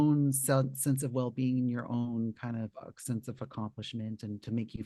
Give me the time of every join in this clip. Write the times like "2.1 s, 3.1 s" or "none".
none